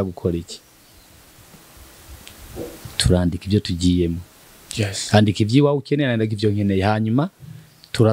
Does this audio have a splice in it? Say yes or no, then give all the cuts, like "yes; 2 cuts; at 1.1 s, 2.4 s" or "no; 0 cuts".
no; 0 cuts